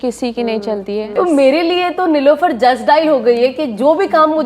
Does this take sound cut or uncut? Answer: cut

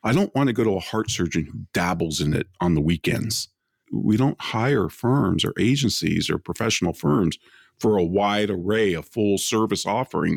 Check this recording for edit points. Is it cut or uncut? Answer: cut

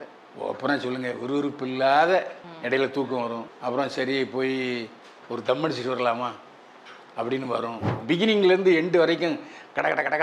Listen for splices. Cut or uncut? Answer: cut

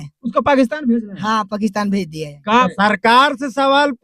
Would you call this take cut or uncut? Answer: cut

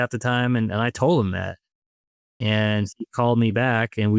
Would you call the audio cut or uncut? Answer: uncut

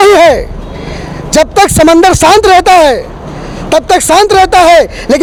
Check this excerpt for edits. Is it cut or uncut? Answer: uncut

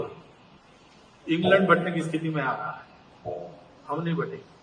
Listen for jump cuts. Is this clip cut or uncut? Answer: uncut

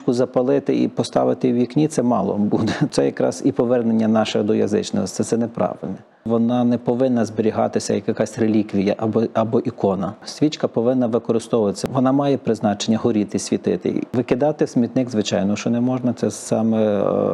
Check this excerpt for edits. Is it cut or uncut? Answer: cut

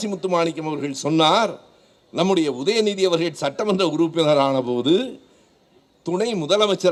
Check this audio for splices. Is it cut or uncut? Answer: uncut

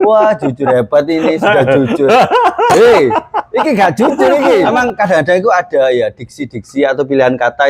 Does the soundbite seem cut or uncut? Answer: cut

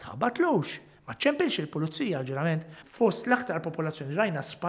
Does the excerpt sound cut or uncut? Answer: cut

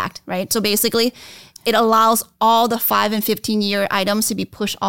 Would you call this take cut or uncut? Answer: uncut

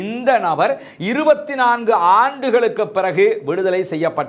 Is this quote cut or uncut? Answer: uncut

